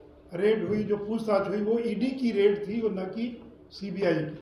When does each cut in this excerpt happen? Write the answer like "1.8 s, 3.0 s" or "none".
none